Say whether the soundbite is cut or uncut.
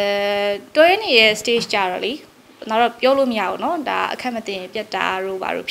uncut